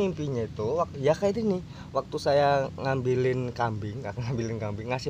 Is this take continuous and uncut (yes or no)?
no